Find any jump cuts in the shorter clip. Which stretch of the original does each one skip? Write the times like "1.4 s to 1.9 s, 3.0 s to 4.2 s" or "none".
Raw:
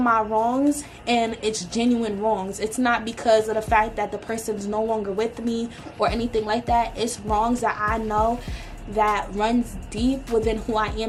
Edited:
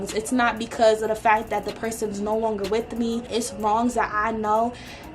5.7 s to 6.9 s